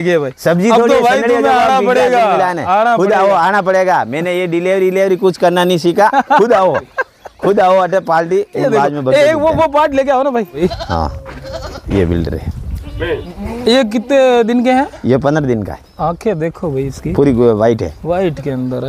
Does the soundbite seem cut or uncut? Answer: cut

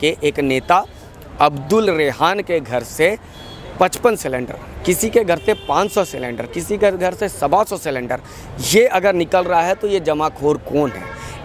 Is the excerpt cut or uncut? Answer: uncut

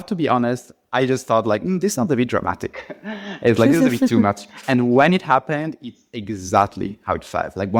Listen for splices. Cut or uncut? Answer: uncut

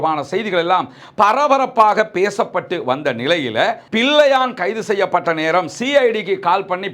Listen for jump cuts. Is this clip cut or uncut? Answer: cut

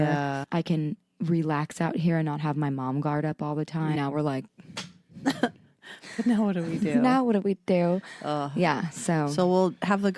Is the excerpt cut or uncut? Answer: cut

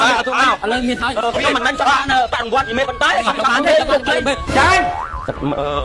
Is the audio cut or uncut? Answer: cut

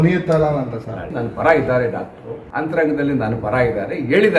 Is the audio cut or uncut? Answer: cut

